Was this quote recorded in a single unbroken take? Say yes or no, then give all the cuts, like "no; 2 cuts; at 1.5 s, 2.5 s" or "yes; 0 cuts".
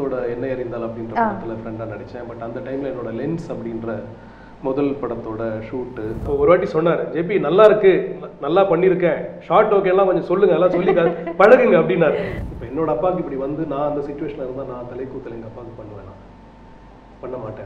no; 2 cuts; at 6.2 s, 12.3 s